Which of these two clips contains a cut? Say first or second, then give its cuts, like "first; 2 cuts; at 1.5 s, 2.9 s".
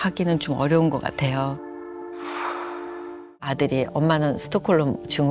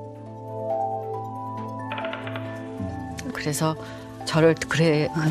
first; 1 cut; at 3.3 s